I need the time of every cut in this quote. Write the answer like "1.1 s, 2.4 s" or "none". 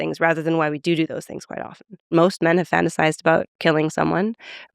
2.1 s